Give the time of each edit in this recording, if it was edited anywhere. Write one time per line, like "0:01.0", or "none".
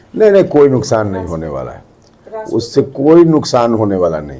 none